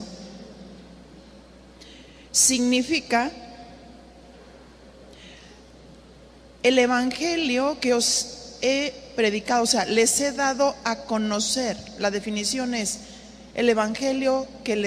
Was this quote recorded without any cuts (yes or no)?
no